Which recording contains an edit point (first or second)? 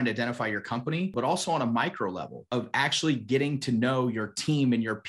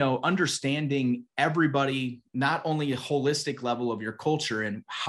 first